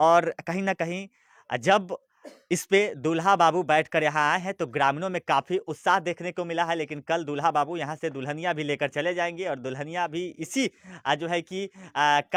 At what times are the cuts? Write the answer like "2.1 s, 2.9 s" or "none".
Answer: none